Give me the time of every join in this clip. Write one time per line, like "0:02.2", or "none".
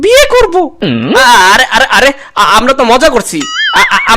0:01.0